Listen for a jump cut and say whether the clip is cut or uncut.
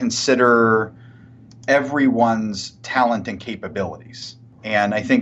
uncut